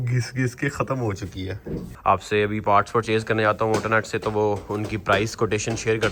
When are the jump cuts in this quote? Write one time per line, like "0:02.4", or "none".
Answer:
0:01.9